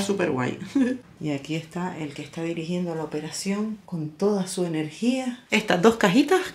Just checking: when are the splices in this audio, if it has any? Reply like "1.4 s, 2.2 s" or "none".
1.0 s, 5.4 s